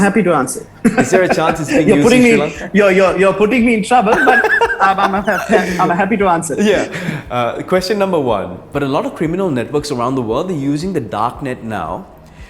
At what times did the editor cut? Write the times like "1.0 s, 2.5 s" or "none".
8.6 s